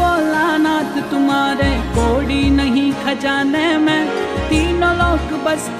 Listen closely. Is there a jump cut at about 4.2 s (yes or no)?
no